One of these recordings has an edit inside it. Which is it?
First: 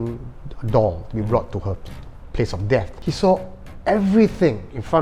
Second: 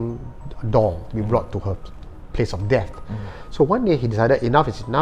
first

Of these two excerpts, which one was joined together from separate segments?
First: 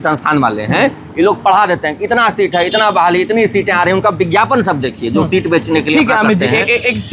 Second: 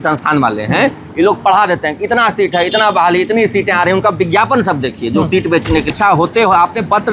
second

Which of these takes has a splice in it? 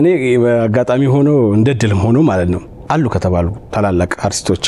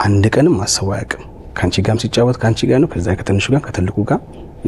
first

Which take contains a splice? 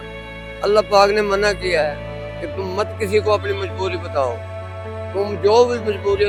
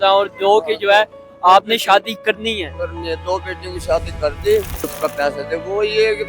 second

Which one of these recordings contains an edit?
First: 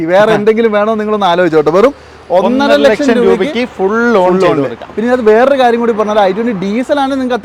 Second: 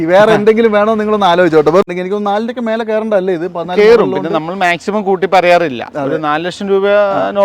second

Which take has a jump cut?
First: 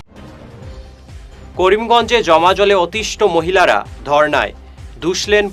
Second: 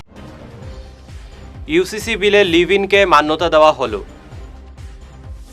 second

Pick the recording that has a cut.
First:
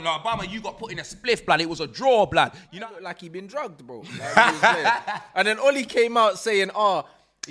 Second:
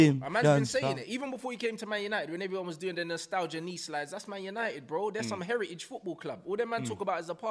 first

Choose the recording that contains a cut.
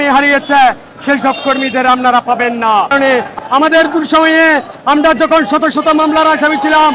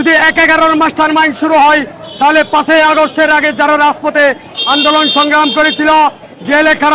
first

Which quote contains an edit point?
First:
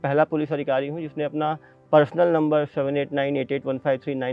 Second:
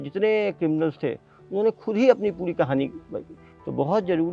second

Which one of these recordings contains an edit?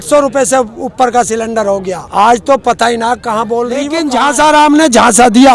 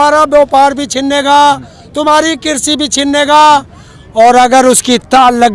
first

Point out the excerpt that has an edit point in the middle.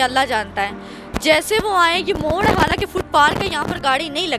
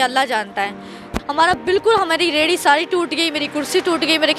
second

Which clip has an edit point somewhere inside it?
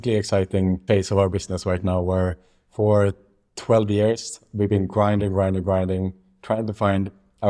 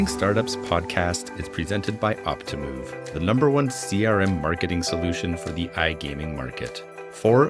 first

